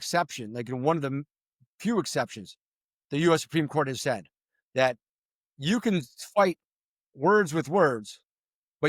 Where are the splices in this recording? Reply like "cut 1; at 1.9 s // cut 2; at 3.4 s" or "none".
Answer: none